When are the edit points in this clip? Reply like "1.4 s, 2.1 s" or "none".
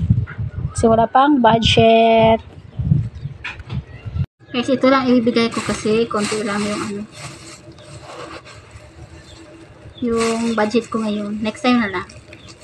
4.4 s